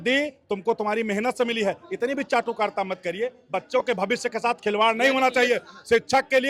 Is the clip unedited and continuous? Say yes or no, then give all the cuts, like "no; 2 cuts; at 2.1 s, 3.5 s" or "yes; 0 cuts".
yes; 0 cuts